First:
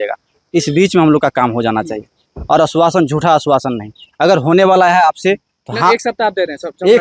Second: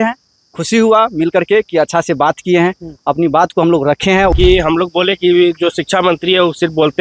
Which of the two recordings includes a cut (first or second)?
second